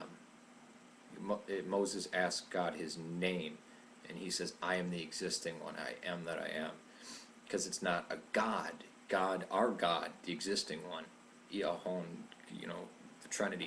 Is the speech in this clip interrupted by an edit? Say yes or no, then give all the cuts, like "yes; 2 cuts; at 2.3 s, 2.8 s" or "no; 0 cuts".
no; 0 cuts